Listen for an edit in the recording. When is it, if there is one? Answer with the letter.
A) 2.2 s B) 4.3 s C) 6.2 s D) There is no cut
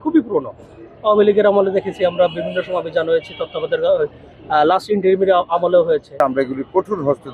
C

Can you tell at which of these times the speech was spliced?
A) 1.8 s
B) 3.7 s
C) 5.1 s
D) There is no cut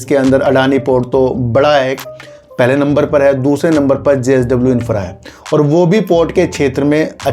D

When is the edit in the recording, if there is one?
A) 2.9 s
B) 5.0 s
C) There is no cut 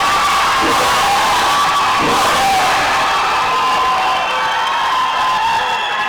C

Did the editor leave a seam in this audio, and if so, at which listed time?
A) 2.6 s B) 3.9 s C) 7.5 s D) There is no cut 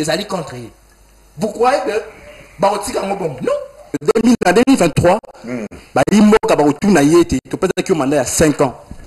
B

